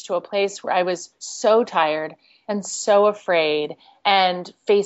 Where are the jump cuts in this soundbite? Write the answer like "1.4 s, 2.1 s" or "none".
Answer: none